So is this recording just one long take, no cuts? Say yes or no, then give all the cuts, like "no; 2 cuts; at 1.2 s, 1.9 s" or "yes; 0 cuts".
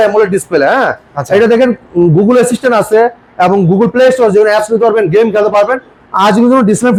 yes; 0 cuts